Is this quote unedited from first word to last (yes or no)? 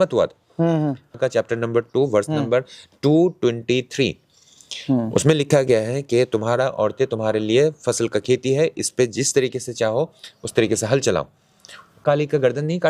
no